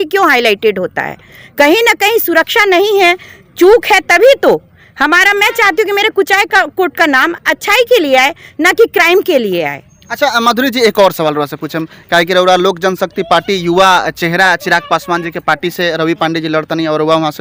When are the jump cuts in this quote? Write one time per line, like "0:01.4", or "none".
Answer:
none